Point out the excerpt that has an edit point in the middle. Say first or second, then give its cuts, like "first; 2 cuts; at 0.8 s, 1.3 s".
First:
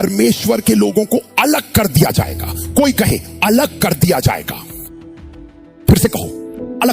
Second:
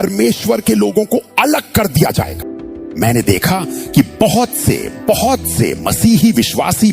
second; 1 cut; at 2.4 s